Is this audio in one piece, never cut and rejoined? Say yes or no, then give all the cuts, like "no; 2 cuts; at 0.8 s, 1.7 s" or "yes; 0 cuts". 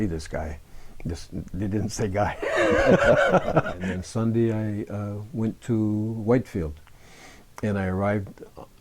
no; 1 cut; at 3.8 s